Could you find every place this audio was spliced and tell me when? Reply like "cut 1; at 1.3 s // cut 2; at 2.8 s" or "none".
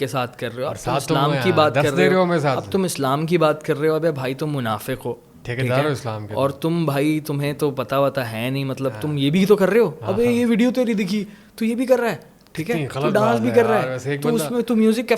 none